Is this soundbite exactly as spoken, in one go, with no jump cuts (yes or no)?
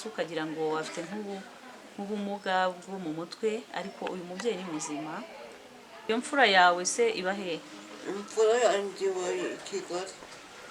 no